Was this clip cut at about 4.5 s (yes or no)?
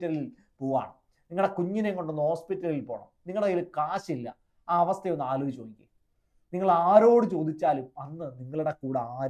no